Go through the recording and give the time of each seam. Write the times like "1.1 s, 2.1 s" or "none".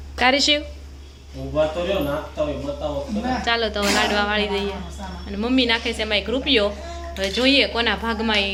none